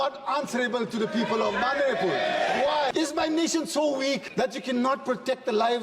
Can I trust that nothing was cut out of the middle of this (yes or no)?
no